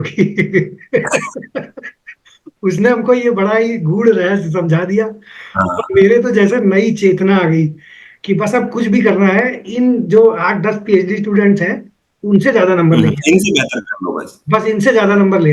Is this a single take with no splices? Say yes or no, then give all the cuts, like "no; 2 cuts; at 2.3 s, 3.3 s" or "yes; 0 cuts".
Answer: yes; 0 cuts